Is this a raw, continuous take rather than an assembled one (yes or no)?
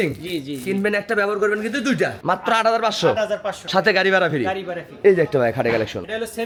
yes